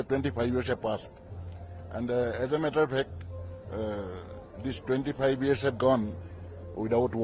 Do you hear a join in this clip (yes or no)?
no